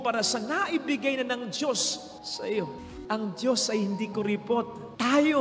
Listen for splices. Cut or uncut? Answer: cut